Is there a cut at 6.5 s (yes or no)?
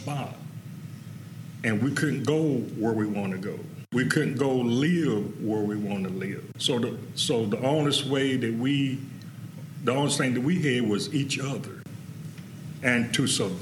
yes